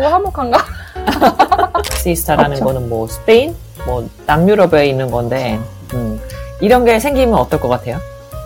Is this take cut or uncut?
cut